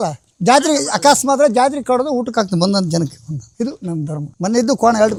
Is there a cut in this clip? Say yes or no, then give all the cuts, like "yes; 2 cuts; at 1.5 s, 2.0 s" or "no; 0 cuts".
no; 0 cuts